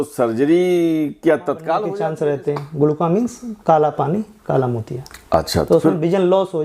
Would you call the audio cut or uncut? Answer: cut